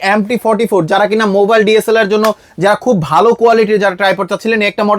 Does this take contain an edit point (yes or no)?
no